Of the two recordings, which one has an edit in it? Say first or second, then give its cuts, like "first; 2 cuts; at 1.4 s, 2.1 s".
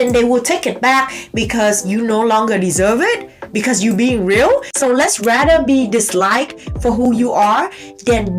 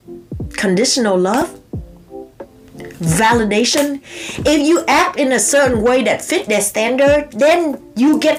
first; 1 cut; at 4.7 s